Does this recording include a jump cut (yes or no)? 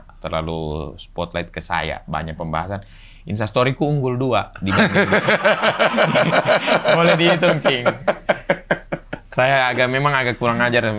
no